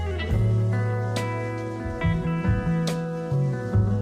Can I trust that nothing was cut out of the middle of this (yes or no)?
yes